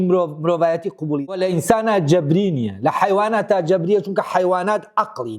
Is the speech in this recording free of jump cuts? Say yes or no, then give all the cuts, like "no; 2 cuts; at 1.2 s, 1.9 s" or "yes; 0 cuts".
no; 1 cut; at 1.3 s